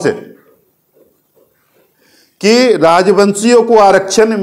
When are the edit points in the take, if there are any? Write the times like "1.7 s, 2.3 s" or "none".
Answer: none